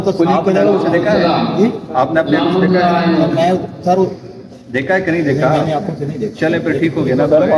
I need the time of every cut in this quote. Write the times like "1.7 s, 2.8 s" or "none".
none